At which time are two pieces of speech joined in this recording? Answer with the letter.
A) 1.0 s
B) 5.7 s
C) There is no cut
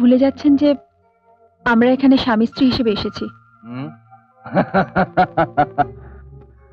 C